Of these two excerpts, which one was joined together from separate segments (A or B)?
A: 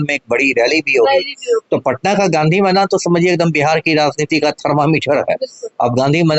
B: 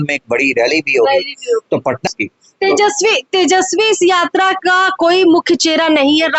B